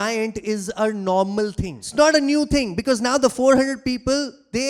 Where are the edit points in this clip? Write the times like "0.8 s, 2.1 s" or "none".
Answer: 1.9 s